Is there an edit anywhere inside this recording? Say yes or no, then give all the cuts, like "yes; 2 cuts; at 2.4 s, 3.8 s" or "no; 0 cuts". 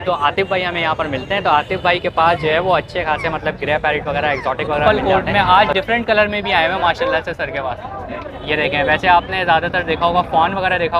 yes; 1 cut; at 4.9 s